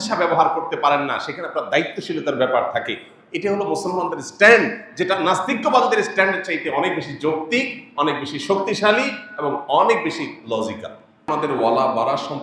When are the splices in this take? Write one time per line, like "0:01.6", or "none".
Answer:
0:11.2